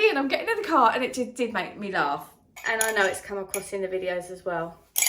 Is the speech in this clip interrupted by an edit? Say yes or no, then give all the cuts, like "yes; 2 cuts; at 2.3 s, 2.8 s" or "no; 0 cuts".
yes; 1 cut; at 2.5 s